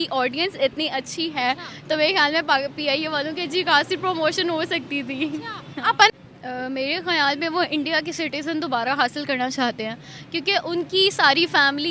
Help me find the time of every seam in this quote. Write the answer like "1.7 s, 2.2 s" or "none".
6.1 s